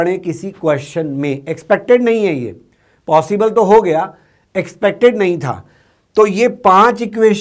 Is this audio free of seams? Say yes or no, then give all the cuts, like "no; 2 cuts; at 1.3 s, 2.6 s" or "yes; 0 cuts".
yes; 0 cuts